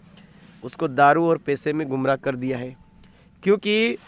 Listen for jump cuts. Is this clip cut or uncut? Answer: uncut